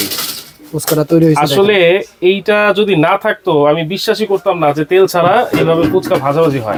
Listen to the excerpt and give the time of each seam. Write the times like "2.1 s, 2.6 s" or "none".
none

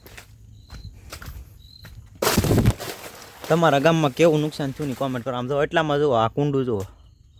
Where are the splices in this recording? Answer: none

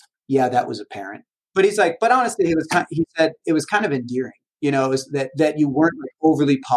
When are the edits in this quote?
1.4 s

